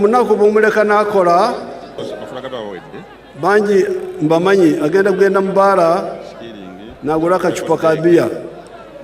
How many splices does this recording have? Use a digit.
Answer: 1